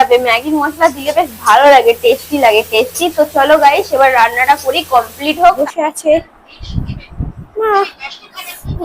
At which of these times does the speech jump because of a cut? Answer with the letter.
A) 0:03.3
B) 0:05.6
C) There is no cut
B